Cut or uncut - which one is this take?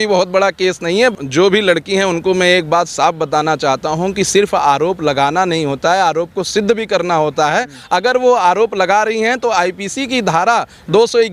cut